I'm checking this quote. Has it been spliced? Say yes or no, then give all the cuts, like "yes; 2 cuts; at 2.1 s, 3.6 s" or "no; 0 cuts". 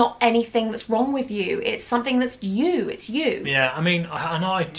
no; 0 cuts